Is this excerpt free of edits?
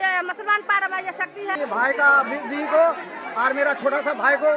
no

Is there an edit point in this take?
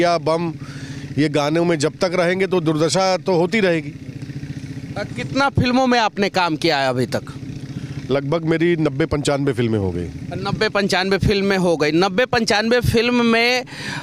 no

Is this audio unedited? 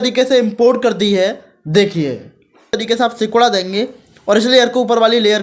no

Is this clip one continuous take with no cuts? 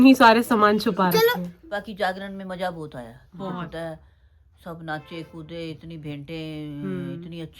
no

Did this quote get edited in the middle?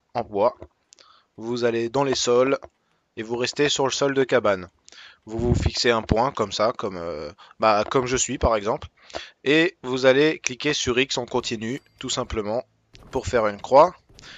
yes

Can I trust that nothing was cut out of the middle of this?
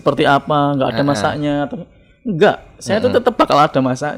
yes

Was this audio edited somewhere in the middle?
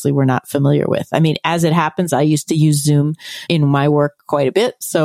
yes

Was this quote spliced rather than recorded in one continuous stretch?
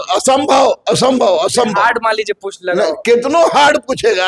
no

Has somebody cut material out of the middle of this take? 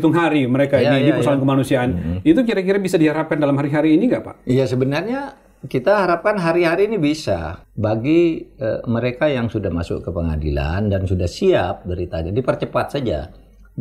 yes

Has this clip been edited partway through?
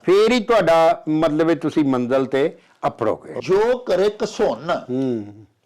yes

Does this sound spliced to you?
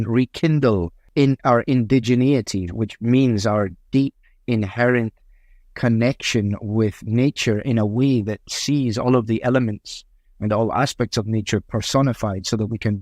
yes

